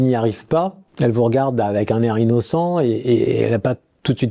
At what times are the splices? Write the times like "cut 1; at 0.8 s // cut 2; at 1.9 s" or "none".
none